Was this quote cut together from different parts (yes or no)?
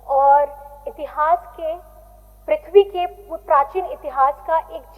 no